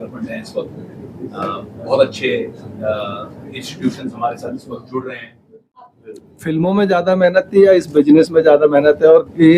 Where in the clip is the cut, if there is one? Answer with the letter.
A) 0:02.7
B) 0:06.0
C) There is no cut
B